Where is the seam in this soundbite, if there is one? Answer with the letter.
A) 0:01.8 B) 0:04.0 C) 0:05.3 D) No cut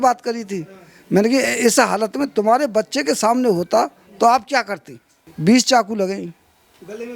C